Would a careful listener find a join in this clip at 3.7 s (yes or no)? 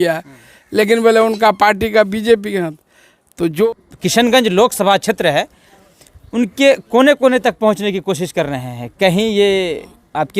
yes